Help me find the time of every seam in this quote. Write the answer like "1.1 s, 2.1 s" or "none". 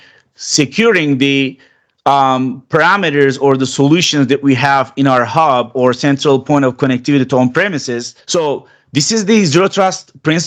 8.1 s